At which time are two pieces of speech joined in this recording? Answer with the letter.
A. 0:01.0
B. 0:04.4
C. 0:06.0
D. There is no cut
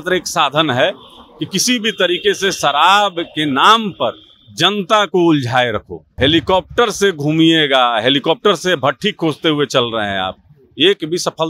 C